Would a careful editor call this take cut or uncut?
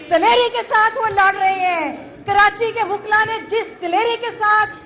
uncut